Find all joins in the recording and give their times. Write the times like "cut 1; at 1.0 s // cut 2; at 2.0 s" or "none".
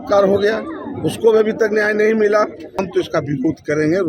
cut 1; at 2.8 s